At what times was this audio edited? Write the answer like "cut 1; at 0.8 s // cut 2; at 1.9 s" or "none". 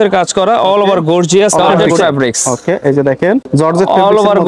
cut 1; at 1.8 s // cut 2; at 3.5 s